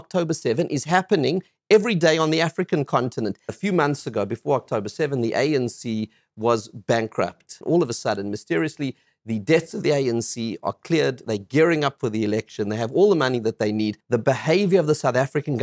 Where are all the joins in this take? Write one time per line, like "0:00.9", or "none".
0:03.5
0:07.5
0:14.0